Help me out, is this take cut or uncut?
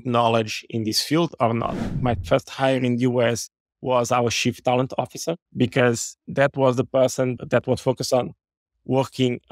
cut